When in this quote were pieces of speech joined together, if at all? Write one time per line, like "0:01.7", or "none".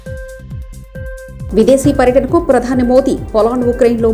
0:01.0